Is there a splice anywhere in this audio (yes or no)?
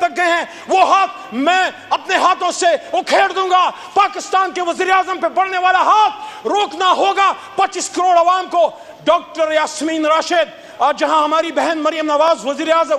no